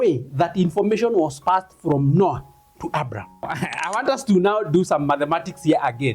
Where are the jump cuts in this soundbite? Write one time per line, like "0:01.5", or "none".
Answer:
0:03.5